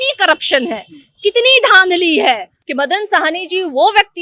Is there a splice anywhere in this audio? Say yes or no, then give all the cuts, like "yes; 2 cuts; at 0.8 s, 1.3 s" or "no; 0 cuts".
yes; 1 cut; at 2.6 s